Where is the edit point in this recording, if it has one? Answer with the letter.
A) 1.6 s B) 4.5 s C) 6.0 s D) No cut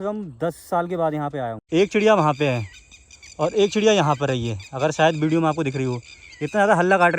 A